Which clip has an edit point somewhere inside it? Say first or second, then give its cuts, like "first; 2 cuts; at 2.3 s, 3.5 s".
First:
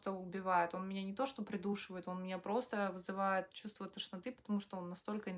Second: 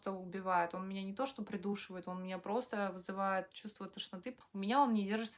second; 1 cut; at 4.3 s